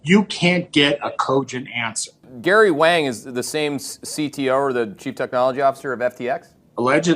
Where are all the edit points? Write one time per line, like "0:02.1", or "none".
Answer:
0:02.3